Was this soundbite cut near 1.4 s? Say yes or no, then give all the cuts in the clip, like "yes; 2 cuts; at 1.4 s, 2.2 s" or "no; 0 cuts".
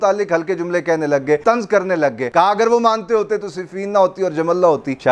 yes; 2 cuts; at 1.4 s, 2.2 s